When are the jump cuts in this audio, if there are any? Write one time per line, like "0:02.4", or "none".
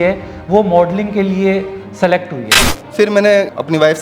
0:02.7